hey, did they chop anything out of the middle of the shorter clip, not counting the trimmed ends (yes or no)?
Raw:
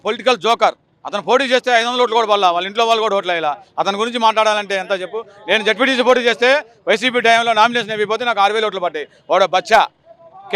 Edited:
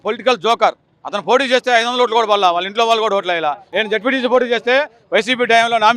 yes